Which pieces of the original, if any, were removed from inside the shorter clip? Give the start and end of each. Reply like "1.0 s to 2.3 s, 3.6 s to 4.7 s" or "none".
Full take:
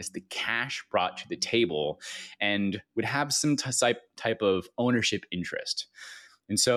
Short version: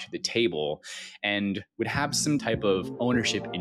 3.6 s to 4.2 s